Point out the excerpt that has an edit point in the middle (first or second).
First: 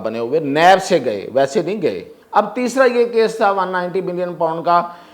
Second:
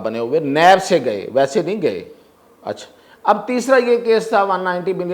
first